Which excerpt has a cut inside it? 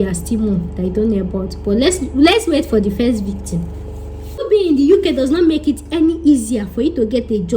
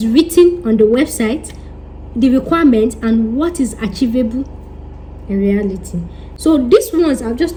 first; 1 cut; at 4.4 s

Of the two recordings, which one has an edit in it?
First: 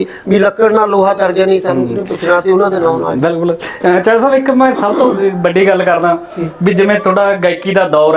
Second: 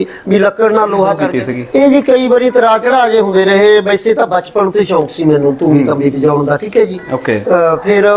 second; 1 cut; at 1.3 s

